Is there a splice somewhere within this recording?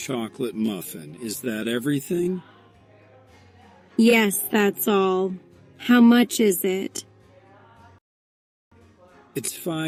no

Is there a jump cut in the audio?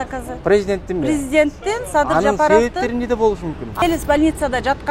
yes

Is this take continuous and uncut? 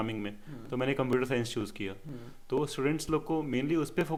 yes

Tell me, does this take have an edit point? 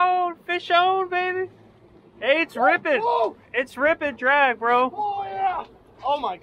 no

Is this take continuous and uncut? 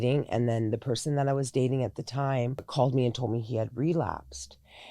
no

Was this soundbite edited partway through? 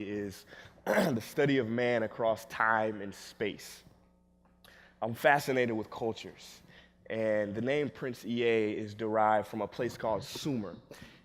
yes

